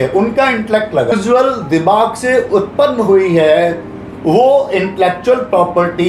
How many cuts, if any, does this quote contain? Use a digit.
1